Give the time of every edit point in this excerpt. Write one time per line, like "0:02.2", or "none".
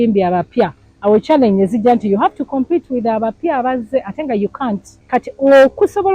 0:04.9